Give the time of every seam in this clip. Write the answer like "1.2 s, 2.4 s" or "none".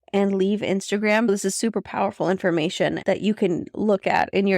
1.3 s, 3.0 s